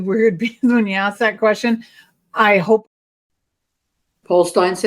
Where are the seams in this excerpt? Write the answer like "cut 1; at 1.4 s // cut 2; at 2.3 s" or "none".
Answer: cut 1; at 2.8 s